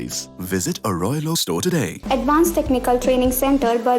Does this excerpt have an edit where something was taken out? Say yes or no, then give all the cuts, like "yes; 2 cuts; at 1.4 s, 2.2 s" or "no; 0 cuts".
yes; 1 cut; at 2.0 s